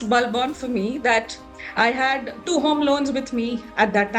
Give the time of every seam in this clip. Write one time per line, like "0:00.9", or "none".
0:01.4